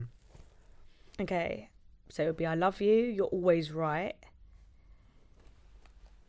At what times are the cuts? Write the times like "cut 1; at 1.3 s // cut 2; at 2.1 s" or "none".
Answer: none